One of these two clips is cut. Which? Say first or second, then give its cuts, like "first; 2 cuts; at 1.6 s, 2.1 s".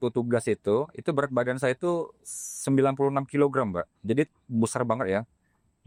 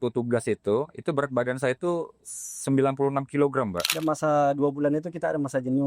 second; 1 cut; at 3.9 s